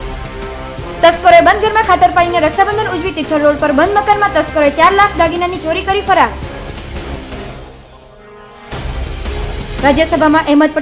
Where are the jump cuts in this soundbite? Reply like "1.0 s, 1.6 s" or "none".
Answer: none